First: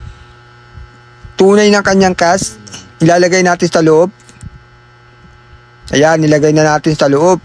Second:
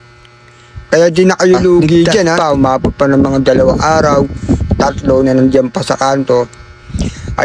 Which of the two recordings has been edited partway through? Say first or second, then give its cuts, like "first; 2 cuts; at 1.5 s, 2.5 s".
second; 1 cut; at 2.4 s